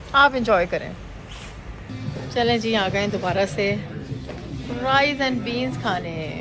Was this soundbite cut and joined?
yes; 1 cut; at 1.9 s

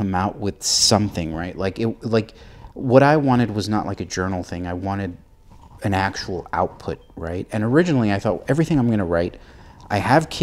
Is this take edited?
no; 0 cuts

